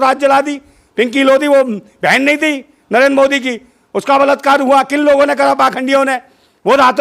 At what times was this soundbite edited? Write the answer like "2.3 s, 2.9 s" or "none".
none